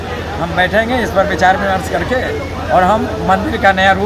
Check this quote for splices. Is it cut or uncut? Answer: uncut